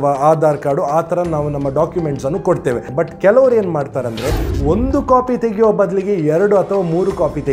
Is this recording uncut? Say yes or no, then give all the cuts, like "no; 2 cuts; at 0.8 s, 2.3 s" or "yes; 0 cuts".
no; 1 cut; at 2.9 s